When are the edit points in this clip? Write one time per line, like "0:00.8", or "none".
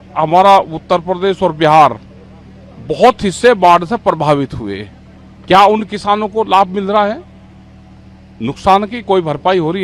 none